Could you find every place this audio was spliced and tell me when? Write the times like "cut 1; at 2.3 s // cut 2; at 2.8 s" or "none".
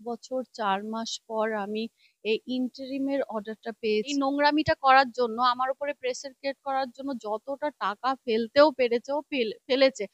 cut 1; at 4.1 s